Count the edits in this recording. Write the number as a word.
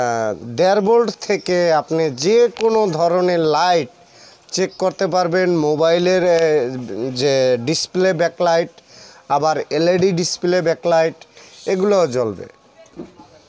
one